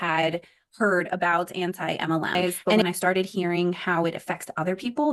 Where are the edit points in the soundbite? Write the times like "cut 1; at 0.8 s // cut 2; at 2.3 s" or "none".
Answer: cut 1; at 2.8 s